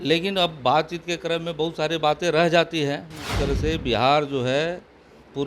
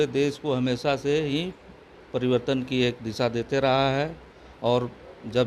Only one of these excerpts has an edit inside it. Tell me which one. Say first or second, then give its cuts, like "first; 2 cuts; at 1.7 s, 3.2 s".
first; 1 cut; at 3.4 s